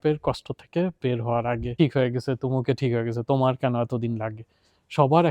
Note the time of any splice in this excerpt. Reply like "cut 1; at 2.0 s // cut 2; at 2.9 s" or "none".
cut 1; at 1.7 s